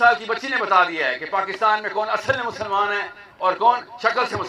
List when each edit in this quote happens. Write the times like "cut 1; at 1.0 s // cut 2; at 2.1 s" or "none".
none